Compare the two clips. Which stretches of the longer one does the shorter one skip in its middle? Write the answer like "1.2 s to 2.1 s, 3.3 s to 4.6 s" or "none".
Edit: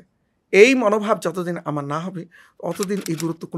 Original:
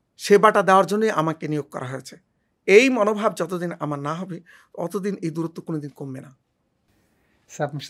none